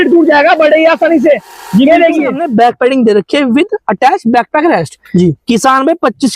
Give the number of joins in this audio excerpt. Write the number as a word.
one